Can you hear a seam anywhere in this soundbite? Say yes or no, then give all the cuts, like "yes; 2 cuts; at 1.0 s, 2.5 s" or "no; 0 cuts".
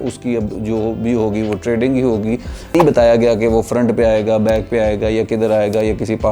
yes; 1 cut; at 2.7 s